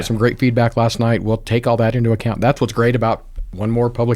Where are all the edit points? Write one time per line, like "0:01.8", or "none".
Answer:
none